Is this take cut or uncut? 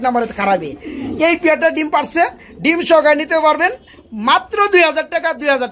uncut